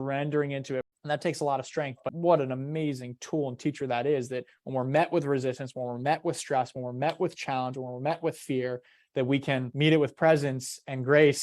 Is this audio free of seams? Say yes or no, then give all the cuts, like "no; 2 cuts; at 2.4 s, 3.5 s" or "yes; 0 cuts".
no; 3 cuts; at 0.9 s, 2.1 s, 9.7 s